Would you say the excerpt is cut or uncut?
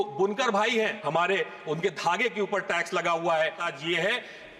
cut